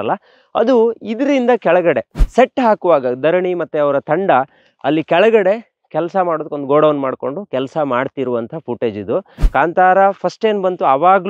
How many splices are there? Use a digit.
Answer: 2